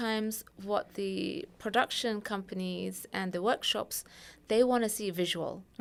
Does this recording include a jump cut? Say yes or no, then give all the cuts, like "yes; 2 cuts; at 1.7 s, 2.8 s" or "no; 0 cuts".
no; 0 cuts